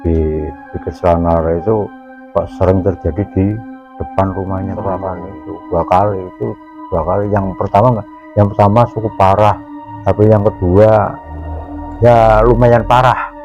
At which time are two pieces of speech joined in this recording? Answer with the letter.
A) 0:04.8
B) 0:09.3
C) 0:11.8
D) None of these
A